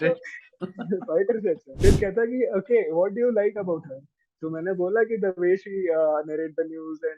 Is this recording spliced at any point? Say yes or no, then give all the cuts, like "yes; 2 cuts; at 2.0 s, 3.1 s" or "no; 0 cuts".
yes; 1 cut; at 1.7 s